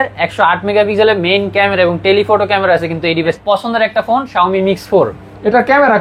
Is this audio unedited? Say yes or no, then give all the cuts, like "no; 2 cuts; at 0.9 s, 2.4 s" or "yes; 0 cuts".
no; 1 cut; at 3.4 s